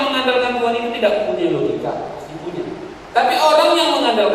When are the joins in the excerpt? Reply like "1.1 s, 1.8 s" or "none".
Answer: 2.9 s